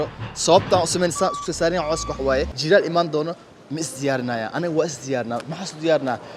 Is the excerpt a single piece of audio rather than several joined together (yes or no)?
no